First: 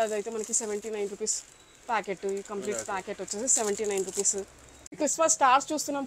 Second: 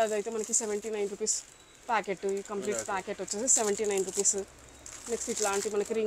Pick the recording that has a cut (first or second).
first